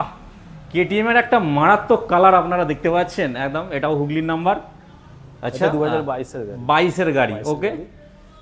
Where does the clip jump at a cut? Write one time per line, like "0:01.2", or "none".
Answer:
none